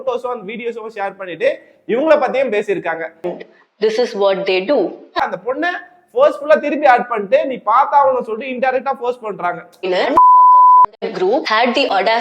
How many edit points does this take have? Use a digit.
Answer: 3